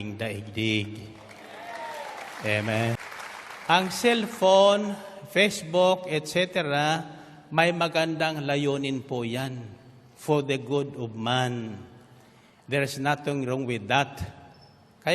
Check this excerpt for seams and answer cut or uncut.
cut